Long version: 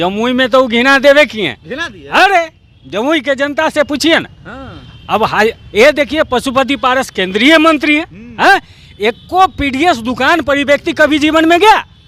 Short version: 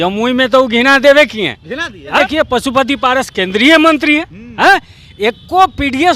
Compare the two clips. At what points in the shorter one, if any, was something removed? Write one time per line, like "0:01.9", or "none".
0:02.2